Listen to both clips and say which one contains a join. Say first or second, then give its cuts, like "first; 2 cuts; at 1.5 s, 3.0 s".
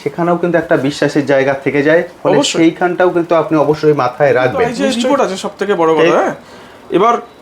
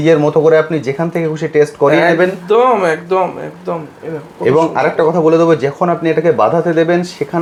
first; 1 cut; at 4.9 s